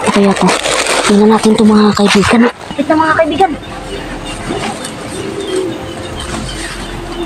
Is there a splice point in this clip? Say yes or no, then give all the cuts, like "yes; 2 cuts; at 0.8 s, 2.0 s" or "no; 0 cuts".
yes; 1 cut; at 2.7 s